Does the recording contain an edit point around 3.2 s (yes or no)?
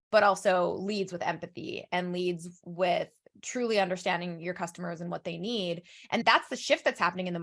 no